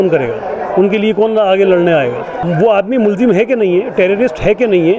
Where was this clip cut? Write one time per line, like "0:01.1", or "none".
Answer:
0:02.4